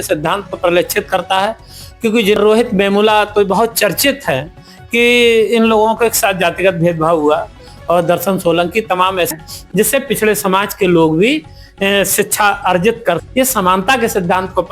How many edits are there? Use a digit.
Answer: 3